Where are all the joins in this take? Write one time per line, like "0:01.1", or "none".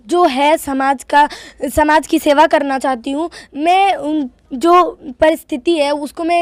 none